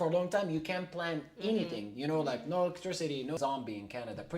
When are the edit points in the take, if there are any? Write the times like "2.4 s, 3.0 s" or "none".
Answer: 3.4 s